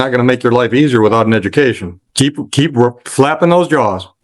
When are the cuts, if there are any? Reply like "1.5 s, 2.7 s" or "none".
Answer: 2.0 s